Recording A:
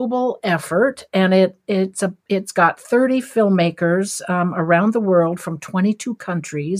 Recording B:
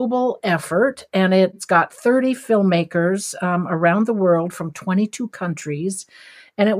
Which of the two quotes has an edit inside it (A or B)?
B